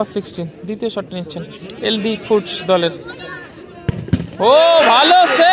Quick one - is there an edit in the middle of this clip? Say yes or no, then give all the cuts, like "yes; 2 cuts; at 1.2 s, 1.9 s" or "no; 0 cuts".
no; 0 cuts